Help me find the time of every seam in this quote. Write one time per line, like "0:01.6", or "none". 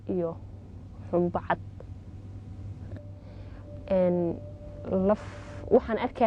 0:02.9